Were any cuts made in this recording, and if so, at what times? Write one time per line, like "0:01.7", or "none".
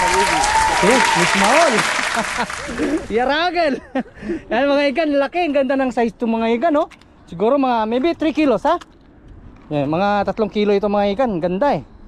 none